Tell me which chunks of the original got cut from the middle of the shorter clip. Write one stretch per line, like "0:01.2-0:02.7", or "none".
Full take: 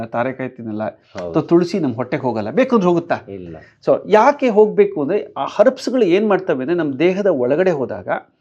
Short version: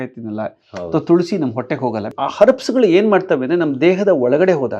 0:02.5-0:05.3